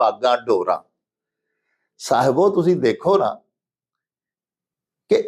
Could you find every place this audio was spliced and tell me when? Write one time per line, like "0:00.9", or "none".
none